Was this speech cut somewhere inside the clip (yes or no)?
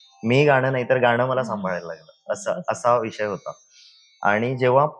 no